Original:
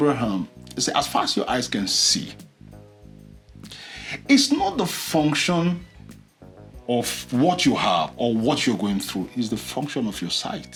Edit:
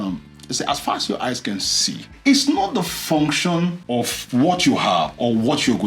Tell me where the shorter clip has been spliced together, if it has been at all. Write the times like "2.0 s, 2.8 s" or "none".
2.1 s, 3.8 s